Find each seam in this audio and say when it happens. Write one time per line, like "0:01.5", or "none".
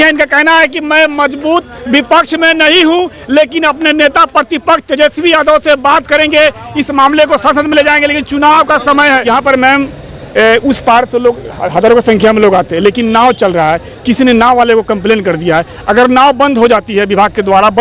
0:09.3